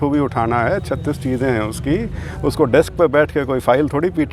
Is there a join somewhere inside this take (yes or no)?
no